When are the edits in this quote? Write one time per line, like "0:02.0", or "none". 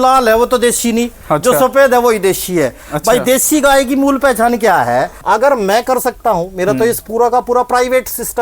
0:05.1